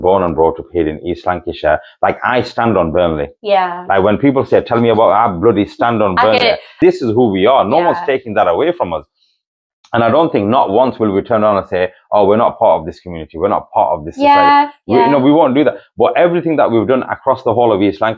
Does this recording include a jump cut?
yes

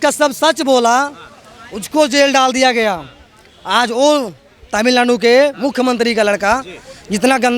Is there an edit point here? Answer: no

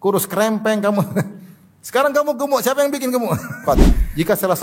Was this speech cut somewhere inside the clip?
yes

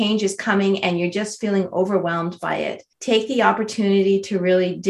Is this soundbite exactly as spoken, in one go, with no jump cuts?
no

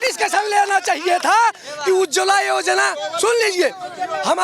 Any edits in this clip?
no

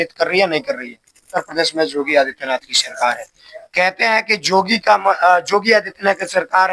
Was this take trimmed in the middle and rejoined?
yes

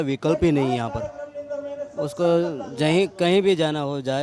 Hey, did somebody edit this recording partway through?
no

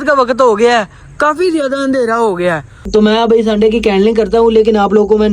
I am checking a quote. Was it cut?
yes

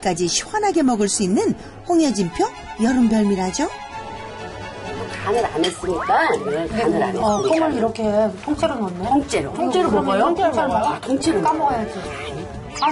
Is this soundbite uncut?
no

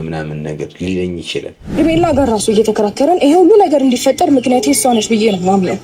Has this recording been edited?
yes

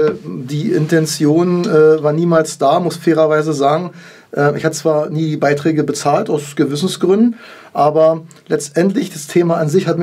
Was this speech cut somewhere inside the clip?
no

